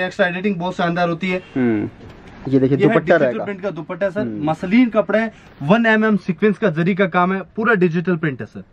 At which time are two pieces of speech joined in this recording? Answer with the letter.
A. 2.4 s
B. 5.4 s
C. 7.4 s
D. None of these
A